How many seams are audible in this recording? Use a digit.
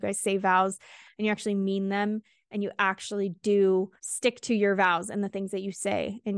1